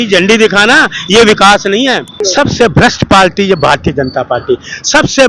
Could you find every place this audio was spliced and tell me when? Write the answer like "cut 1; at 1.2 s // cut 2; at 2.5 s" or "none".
cut 1; at 2.2 s

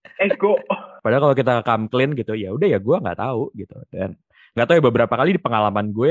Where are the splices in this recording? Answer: cut 1; at 0.9 s

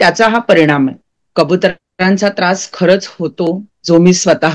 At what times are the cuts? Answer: cut 1; at 1.2 s

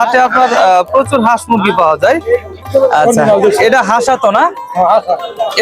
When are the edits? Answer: cut 1; at 2.6 s

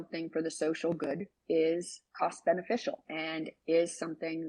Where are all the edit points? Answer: cut 1; at 2.0 s // cut 2; at 3.1 s

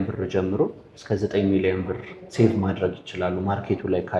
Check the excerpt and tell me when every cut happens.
none

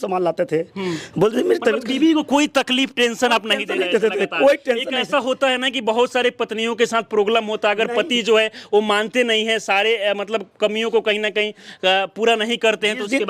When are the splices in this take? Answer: none

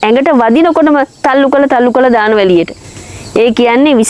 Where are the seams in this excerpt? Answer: none

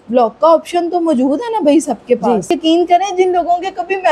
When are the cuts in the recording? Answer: cut 1; at 2.6 s

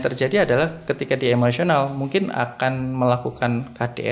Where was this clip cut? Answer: none

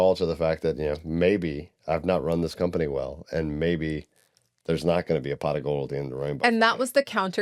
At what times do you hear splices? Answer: none

